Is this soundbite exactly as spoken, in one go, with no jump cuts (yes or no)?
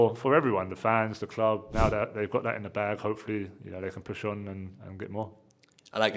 no